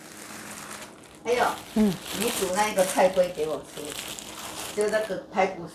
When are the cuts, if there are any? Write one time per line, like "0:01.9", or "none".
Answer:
none